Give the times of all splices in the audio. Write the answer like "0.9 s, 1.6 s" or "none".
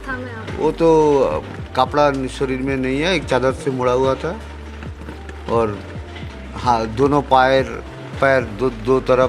none